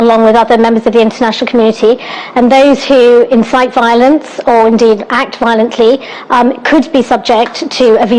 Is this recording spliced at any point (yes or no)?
no